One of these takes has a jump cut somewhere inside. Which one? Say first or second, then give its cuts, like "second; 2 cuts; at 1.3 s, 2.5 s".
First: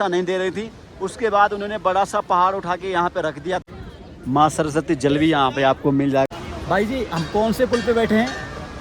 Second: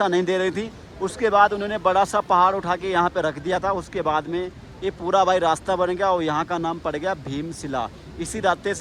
first; 2 cuts; at 3.6 s, 6.3 s